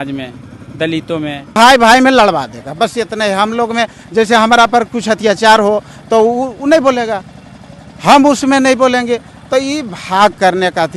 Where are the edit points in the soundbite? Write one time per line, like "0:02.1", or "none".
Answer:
0:01.6